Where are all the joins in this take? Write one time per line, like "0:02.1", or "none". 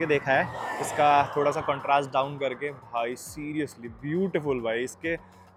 none